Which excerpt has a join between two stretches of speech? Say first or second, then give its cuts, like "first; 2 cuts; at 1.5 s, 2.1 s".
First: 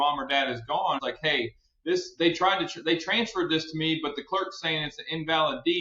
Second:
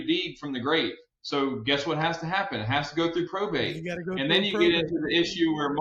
first; 1 cut; at 1.0 s